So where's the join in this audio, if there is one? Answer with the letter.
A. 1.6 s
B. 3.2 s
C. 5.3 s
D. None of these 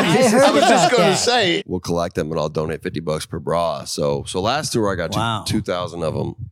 A